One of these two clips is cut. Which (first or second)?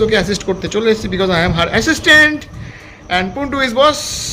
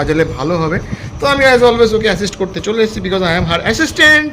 second